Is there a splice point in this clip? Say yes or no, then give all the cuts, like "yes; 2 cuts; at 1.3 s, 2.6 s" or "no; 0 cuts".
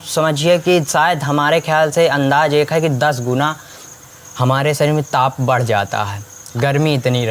no; 0 cuts